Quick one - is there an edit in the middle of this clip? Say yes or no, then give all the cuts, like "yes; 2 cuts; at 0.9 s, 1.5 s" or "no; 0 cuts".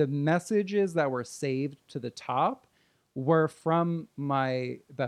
no; 0 cuts